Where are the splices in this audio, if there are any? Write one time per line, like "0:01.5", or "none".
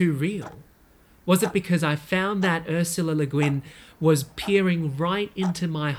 none